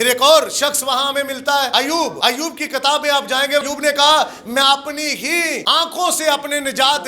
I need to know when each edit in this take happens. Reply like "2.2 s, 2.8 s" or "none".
1.9 s, 3.6 s, 5.6 s